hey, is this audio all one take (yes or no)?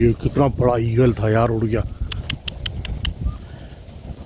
yes